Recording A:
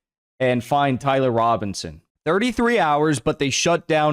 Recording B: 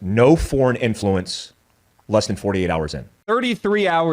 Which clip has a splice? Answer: B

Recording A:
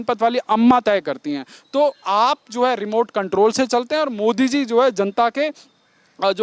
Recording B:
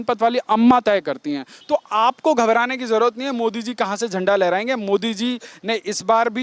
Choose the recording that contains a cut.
B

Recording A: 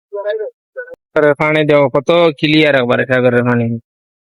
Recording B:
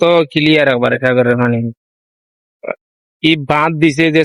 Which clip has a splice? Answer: A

